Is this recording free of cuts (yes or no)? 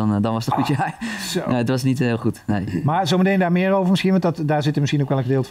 yes